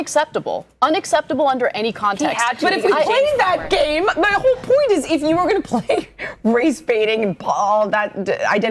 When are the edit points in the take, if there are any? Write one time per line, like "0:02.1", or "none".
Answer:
0:01.7